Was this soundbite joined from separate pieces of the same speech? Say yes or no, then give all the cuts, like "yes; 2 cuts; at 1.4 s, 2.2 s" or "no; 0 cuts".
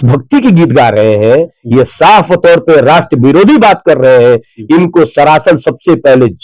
no; 0 cuts